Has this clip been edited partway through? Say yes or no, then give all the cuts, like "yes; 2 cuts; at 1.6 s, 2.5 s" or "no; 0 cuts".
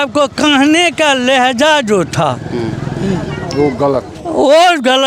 no; 0 cuts